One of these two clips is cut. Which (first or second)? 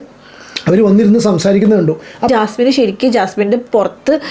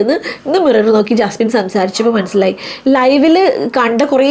first